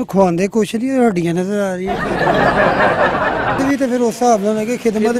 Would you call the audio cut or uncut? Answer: cut